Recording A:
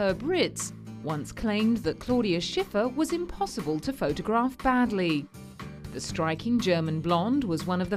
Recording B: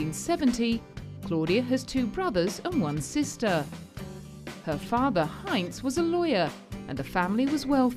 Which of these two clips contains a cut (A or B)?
B